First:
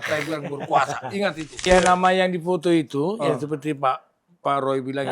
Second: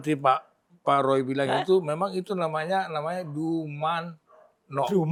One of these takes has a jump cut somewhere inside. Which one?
first; 1 cut; at 1.5 s

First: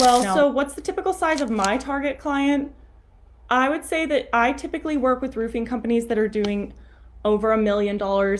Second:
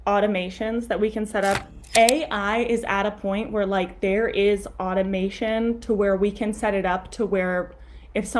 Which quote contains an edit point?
second; 1 cut; at 1.7 s

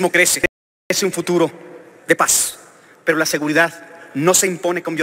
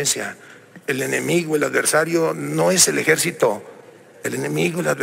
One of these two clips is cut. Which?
first; 1 cut; at 0.9 s

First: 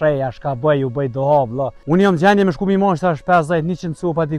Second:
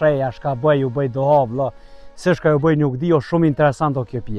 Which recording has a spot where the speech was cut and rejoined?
first; 1 cut; at 1.8 s

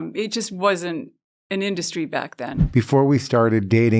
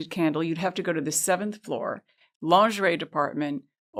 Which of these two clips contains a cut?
first; 1 cut; at 2.5 s

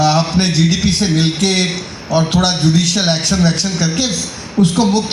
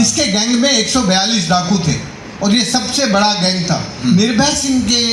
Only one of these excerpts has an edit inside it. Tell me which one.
second; 1 cut; at 4.0 s

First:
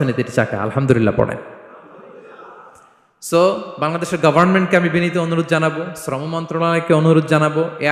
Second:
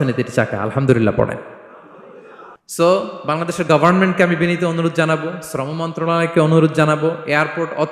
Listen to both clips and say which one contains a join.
second; 1 cut; at 2.6 s

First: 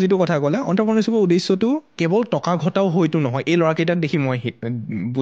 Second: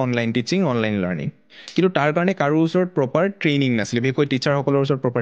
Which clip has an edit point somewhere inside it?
first; 1 cut; at 1.9 s

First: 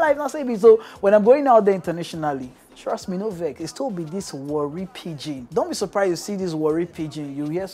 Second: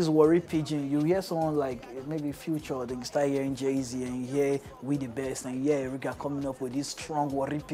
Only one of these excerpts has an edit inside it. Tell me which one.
first; 1 cut; at 5.4 s

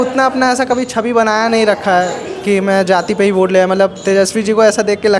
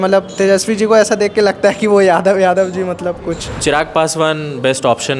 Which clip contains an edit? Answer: second; 1 cut; at 3.5 s

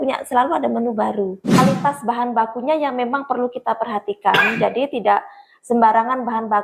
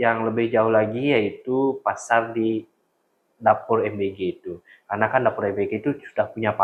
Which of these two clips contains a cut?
first; 1 cut; at 1.6 s

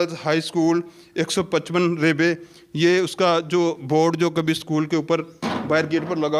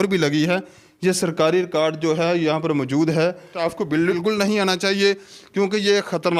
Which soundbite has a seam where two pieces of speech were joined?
second; 1 cut; at 3.8 s

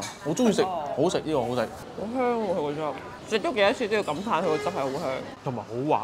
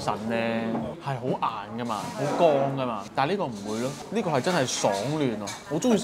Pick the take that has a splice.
first; 1 cut; at 1.8 s

